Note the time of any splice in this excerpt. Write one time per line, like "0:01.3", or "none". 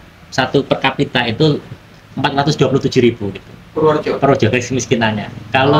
none